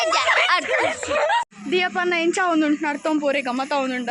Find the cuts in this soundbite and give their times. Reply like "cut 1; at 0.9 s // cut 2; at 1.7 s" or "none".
cut 1; at 1.5 s